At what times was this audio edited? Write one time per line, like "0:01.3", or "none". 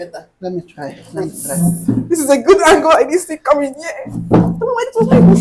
none